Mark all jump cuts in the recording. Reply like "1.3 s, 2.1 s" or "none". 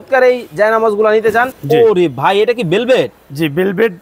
1.6 s